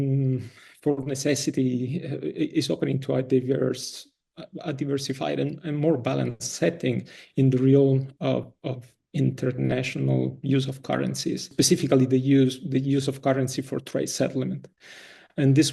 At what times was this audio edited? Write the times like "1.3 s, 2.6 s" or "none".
11.5 s